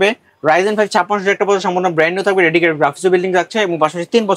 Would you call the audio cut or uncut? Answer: uncut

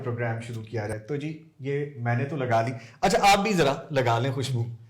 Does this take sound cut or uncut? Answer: cut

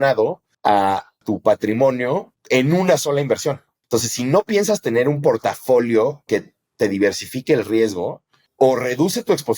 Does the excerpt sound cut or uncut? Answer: cut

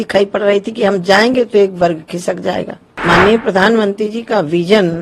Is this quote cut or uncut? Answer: cut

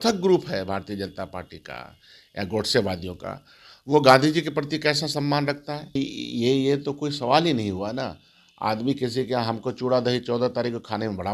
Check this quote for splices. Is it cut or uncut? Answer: cut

